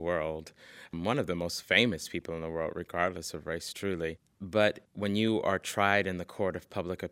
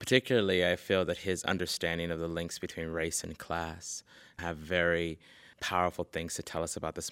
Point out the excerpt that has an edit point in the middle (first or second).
first